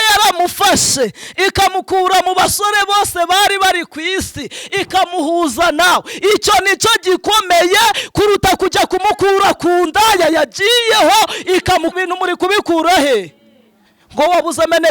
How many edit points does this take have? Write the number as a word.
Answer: one